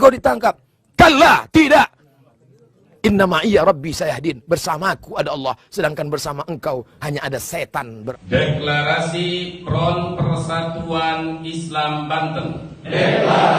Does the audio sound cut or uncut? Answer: cut